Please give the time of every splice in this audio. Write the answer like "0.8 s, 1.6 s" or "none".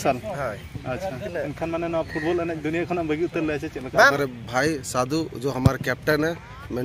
1.2 s, 4.1 s